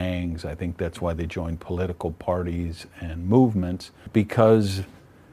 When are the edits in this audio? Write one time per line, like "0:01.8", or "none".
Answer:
0:04.0